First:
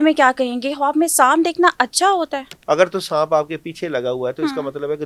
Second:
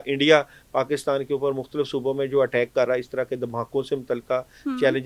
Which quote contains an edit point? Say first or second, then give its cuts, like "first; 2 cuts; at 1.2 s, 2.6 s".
first; 1 cut; at 2.5 s